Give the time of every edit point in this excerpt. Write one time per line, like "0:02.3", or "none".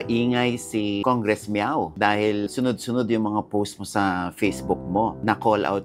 0:01.0
0:02.5